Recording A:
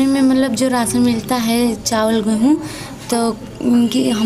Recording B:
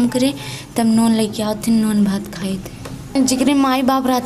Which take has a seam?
B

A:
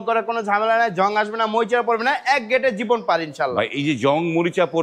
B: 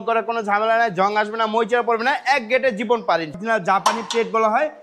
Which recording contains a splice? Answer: B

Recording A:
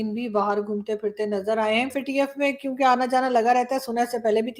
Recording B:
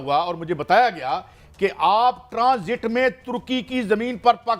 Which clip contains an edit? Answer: A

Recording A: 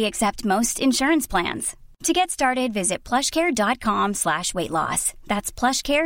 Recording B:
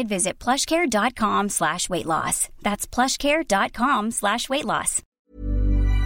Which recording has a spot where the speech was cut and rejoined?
B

